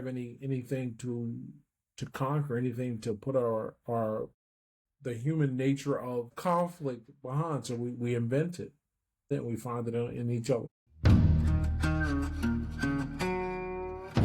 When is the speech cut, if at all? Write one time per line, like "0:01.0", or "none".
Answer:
0:06.3
0:09.3
0:10.8